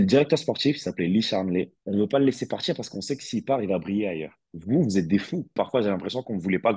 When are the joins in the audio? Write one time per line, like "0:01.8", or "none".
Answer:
0:05.5